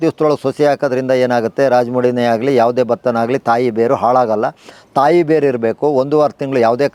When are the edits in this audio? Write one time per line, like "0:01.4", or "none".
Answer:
none